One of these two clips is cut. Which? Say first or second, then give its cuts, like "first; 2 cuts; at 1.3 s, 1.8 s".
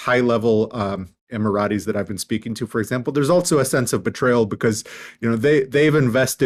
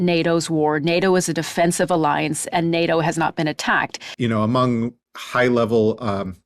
second; 1 cut; at 4.0 s